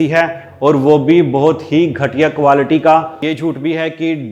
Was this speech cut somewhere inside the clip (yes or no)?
yes